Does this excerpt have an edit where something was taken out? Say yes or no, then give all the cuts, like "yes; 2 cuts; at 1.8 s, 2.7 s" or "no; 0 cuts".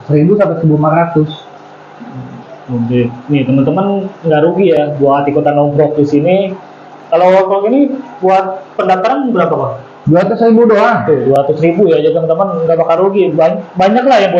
no; 0 cuts